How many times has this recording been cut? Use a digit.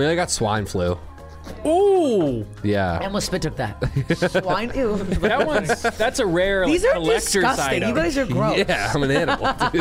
0